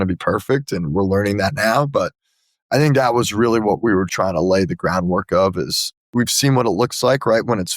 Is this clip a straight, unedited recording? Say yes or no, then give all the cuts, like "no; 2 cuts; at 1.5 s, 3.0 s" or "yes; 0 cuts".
no; 2 cuts; at 4.1 s, 6.1 s